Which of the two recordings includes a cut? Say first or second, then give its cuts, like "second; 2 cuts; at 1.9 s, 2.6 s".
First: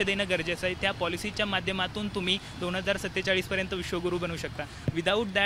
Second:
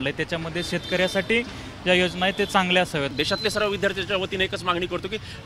second; 1 cut; at 3.1 s